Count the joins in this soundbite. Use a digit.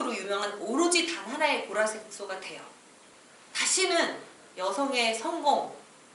1